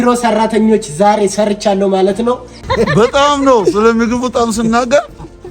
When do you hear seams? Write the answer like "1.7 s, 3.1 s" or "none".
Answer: 2.7 s